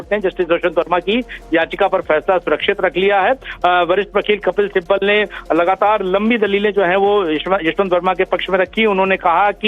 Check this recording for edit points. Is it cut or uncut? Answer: cut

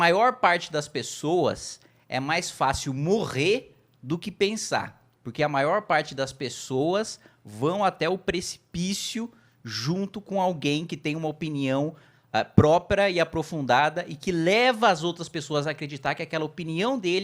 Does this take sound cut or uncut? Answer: uncut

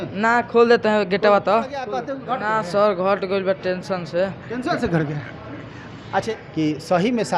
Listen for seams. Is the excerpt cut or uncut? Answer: cut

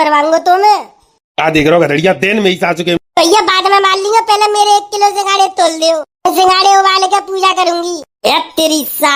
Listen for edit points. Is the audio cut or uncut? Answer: uncut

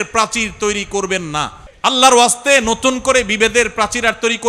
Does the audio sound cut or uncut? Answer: cut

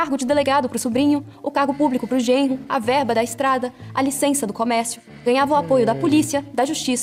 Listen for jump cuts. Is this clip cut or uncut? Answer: uncut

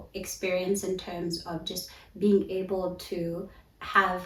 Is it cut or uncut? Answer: uncut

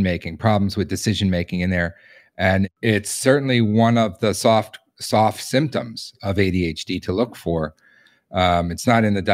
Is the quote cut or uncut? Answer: cut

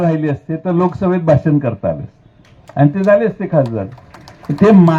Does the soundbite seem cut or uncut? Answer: uncut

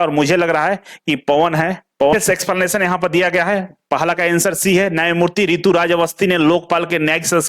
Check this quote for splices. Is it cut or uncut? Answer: cut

